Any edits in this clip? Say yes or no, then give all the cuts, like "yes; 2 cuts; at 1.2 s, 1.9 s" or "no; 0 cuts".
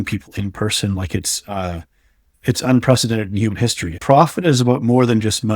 yes; 1 cut; at 4.0 s